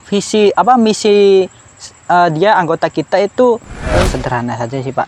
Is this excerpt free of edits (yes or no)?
no